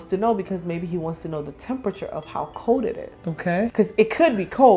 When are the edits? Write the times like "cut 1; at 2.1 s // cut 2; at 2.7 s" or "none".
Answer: cut 1; at 3.7 s